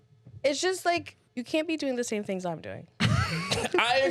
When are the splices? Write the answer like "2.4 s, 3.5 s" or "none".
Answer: 1.2 s